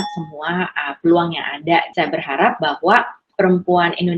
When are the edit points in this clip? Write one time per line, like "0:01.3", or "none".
0:01.9
0:03.2